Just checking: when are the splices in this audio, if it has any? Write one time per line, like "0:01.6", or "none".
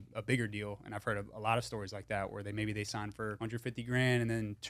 0:03.4